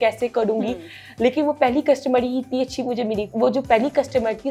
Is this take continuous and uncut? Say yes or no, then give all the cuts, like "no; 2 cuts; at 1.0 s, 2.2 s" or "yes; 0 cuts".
no; 1 cut; at 3.3 s